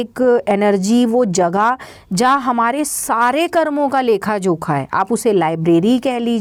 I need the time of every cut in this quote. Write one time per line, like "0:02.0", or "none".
none

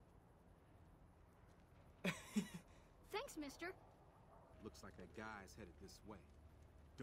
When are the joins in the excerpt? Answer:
0:04.5

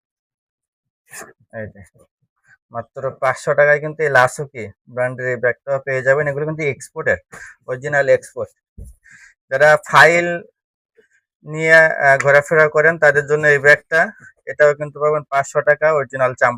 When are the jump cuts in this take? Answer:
none

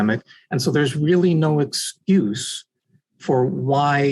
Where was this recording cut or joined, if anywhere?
none

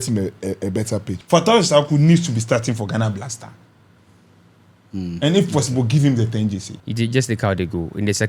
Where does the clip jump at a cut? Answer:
0:01.1
0:06.7

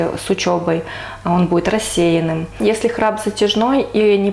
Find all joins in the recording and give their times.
0:02.5

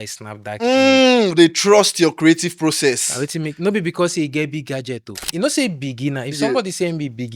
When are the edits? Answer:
0:05.2

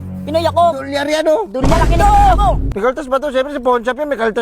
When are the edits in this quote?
0:02.7

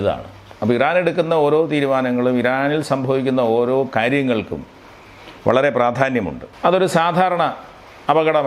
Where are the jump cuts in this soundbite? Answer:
0:06.4

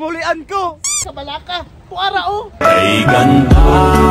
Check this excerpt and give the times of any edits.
0:01.0

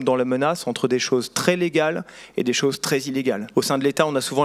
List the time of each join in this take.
0:03.4

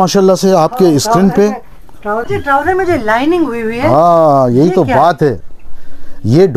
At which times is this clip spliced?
0:02.2

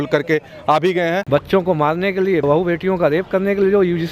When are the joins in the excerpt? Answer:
0:01.2
0:02.4

